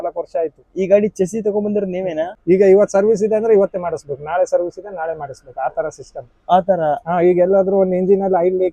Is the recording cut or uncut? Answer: cut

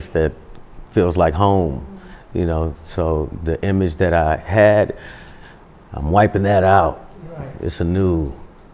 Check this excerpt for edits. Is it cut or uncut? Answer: uncut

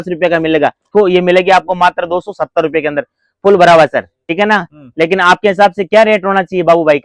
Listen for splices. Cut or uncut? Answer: cut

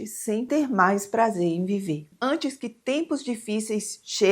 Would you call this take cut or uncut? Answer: cut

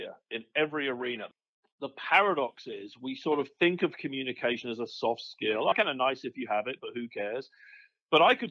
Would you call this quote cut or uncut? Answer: cut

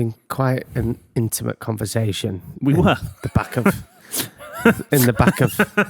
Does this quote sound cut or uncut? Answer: uncut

